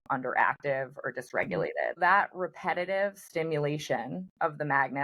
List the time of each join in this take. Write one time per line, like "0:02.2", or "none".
0:02.0